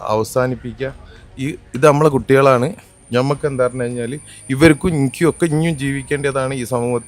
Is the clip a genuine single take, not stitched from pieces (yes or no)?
yes